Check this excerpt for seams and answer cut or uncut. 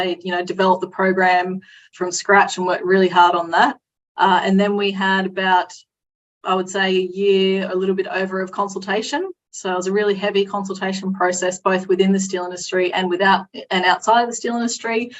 uncut